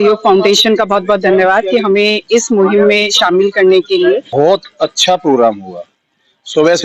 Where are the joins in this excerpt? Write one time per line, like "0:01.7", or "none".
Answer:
0:04.3

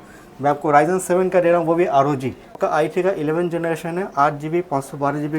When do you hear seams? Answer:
0:02.6

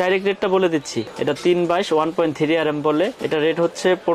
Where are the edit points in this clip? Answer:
0:01.1

